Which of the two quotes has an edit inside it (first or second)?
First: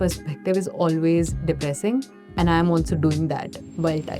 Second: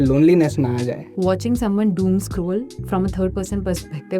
second